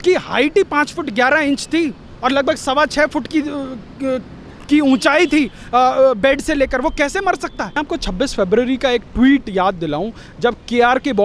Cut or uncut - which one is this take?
cut